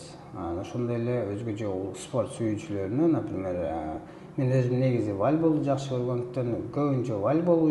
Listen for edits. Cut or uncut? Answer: uncut